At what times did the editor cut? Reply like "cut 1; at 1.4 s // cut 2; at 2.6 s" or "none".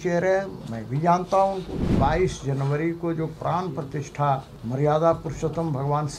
cut 1; at 1.9 s // cut 2; at 4.5 s